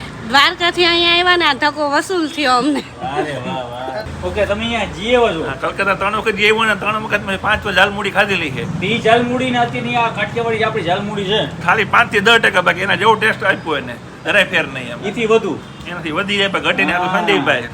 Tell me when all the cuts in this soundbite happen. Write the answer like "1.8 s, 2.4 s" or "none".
4.1 s